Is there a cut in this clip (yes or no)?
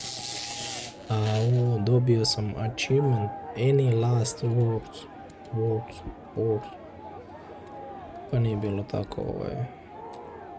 no